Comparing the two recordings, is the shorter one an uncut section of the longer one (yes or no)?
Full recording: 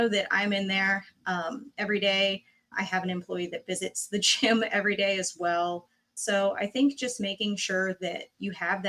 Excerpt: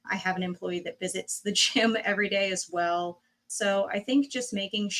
yes